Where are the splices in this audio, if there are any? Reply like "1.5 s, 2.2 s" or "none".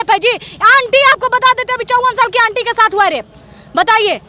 none